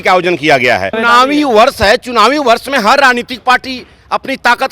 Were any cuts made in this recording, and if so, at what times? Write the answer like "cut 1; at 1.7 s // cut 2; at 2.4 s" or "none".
cut 1; at 1.0 s

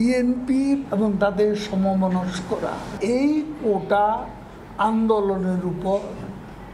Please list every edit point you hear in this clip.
none

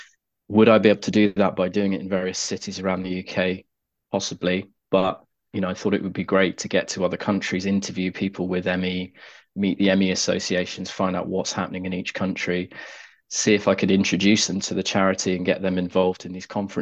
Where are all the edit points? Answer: none

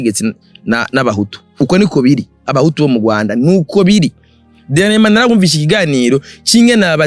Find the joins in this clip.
none

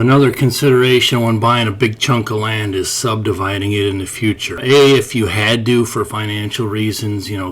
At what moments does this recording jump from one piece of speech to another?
cut 1; at 4.6 s

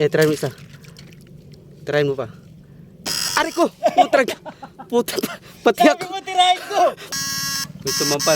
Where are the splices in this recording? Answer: cut 1; at 7.0 s

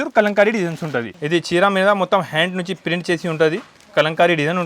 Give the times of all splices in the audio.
cut 1; at 1.1 s

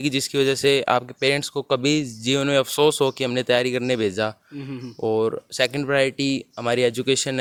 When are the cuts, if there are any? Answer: none

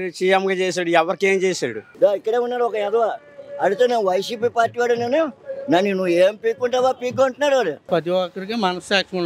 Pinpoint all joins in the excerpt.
cut 1; at 1.8 s // cut 2; at 7.9 s

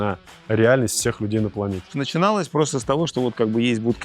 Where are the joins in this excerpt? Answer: cut 1; at 1.9 s

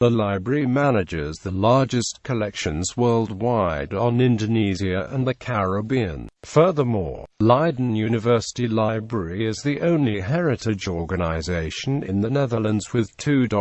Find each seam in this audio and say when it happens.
none

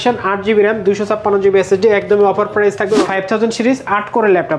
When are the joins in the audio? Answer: cut 1; at 3.1 s

